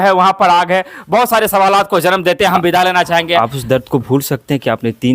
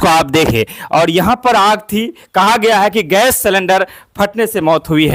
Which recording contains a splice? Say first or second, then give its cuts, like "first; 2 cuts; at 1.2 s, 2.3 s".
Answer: first; 1 cut; at 3.4 s